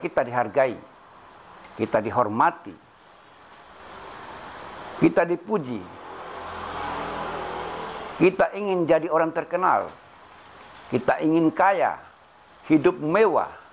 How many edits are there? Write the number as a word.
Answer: zero